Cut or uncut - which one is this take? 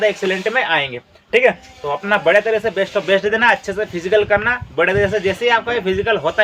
uncut